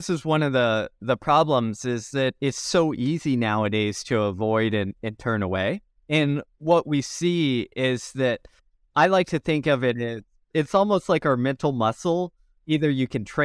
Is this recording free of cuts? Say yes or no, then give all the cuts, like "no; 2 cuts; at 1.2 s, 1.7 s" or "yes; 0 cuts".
yes; 0 cuts